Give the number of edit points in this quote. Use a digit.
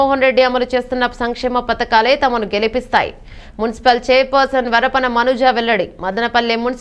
0